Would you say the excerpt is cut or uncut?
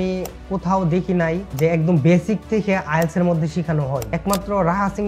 cut